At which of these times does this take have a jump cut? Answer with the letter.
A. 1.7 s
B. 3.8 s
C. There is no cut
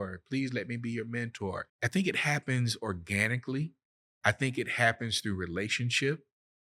A